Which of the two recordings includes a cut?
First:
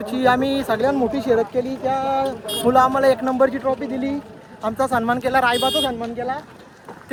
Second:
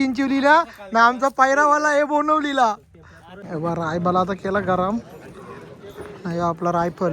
second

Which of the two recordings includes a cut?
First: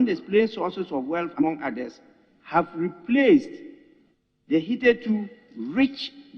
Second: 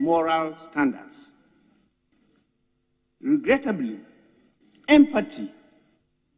first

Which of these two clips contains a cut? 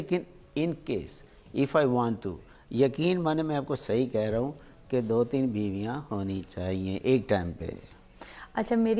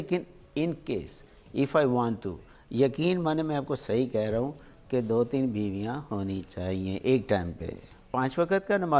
second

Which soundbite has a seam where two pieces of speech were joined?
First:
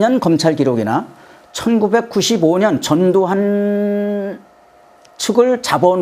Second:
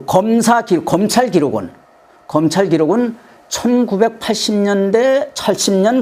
second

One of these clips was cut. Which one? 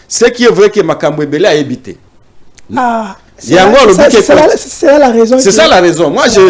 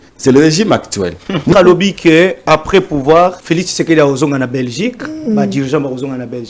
second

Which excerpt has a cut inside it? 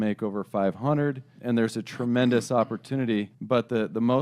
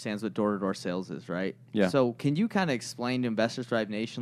first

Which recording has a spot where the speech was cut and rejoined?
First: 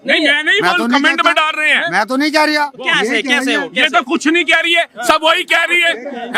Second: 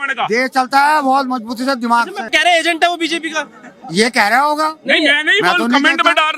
second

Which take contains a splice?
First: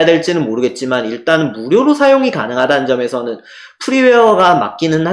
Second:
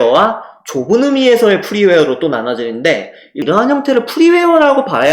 second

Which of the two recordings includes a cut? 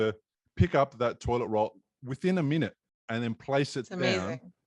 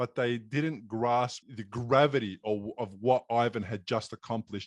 second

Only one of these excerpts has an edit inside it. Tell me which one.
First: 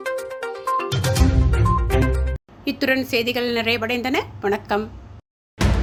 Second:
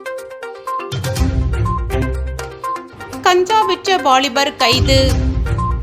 second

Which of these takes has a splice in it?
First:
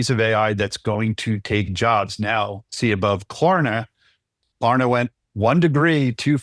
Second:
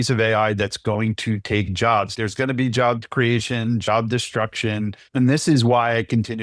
second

